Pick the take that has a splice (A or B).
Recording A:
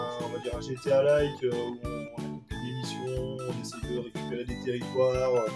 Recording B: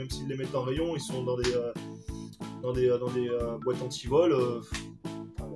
B